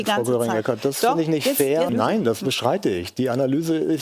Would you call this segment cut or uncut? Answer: cut